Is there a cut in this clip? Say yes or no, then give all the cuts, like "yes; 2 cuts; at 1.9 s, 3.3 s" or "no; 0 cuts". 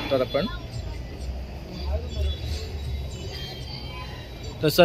no; 0 cuts